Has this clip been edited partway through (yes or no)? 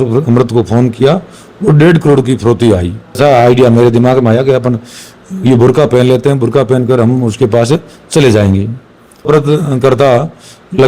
yes